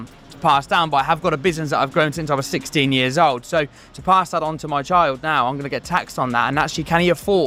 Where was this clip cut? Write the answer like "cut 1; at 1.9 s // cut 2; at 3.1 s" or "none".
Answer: none

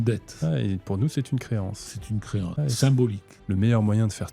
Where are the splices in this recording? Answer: cut 1; at 2.5 s // cut 2; at 3.3 s

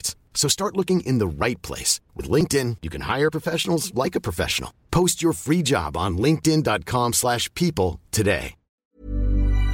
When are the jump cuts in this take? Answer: cut 1; at 8.7 s

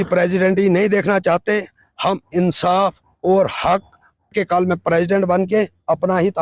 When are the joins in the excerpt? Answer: cut 1; at 4.3 s

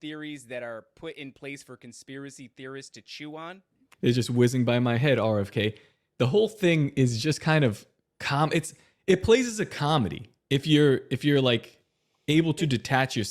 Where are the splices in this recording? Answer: cut 1; at 3.8 s

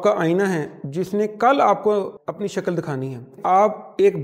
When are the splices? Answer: cut 1; at 2.2 s // cut 2; at 3.4 s

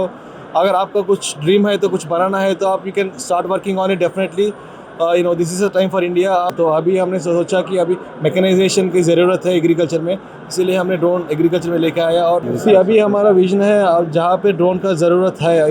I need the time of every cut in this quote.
cut 1; at 6.5 s // cut 2; at 12.5 s

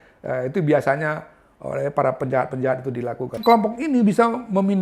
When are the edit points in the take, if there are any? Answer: cut 1; at 3.4 s

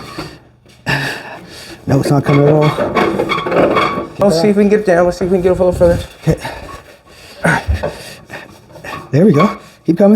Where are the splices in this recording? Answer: cut 1; at 4.2 s

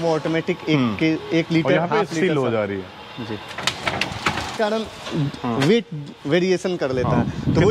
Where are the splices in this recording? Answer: cut 1; at 4.5 s

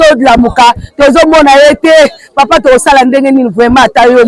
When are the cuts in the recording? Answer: none

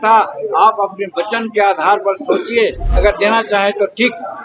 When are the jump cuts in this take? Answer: none

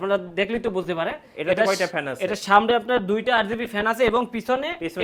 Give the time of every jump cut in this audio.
none

